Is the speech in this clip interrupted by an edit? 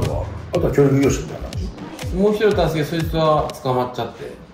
no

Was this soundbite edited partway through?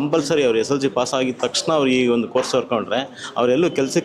no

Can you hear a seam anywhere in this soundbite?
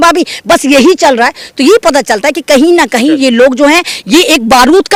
no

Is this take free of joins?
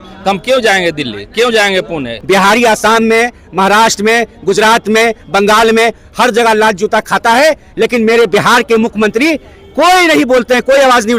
no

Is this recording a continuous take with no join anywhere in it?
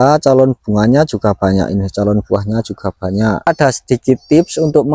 no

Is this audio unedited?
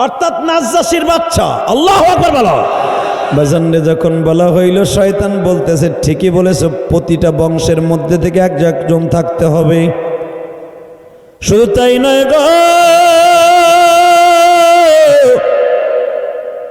no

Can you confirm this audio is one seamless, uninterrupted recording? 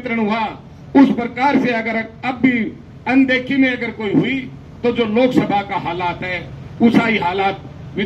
yes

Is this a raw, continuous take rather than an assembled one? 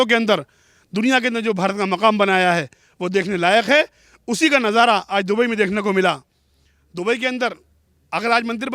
yes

